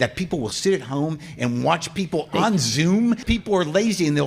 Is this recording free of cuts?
no; 1 cut; at 3.2 s

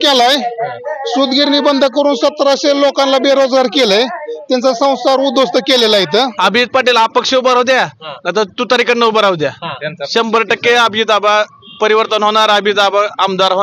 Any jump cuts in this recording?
yes; 1 cut; at 6.3 s

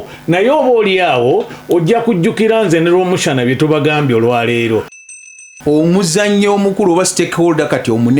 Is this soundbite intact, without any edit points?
no; 1 cut; at 5.0 s

